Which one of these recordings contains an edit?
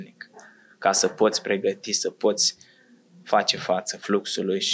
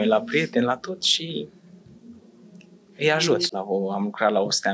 second; 1 cut; at 3.5 s

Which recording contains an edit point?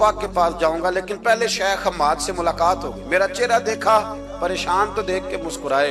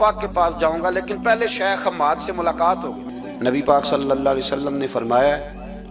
second; 1 cut; at 3.0 s

